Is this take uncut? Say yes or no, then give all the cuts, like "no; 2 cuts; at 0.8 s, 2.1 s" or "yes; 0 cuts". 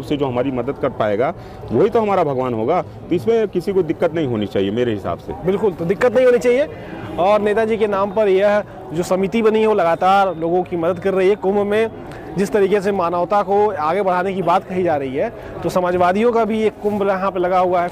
yes; 0 cuts